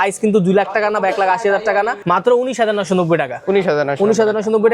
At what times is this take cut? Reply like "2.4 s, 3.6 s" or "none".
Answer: 2.0 s